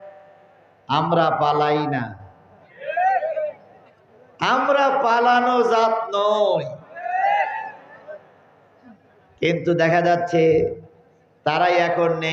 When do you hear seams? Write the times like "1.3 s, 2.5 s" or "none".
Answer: none